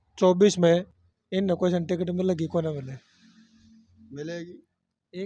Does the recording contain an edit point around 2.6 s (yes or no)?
no